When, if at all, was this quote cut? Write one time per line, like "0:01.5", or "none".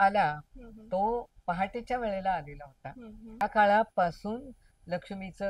0:03.4